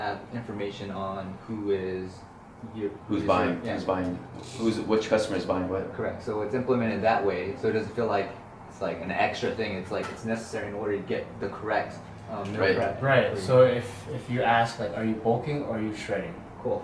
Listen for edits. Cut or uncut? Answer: uncut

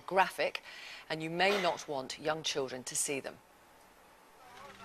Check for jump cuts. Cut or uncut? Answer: uncut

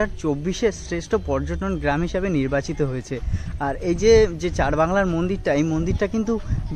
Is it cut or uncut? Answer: uncut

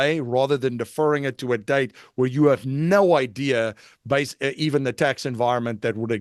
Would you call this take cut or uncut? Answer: uncut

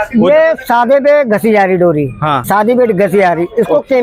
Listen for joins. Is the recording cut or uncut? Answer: cut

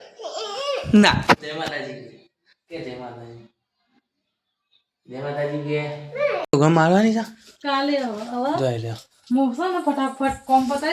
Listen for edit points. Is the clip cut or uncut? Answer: cut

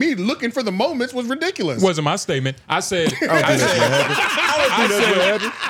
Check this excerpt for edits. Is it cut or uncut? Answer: uncut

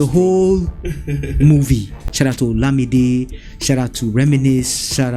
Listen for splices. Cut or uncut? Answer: cut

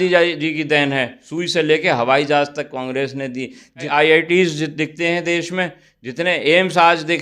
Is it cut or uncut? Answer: cut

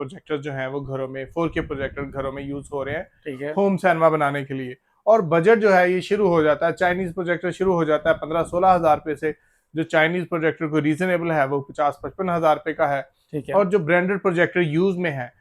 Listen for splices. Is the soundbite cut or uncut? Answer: uncut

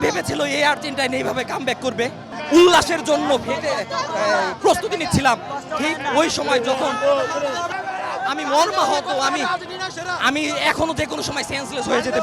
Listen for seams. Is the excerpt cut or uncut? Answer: uncut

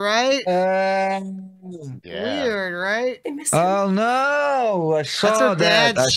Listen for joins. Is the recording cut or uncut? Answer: cut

